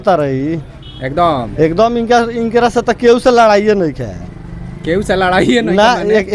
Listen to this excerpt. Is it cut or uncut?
uncut